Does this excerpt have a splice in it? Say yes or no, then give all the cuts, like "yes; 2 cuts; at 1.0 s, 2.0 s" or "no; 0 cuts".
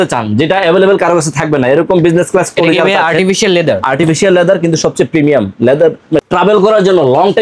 yes; 1 cut; at 6.2 s